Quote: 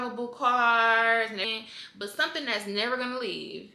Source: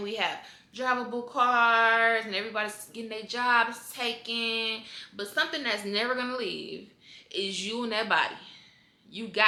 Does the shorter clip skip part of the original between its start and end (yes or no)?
yes